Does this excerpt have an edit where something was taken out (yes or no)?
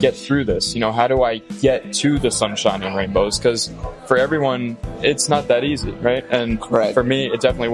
no